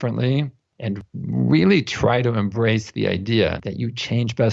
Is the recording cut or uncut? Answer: cut